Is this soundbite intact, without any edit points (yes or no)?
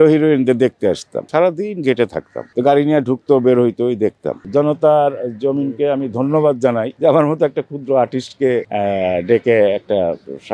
no